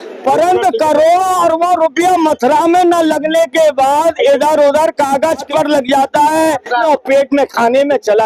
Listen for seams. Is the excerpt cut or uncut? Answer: cut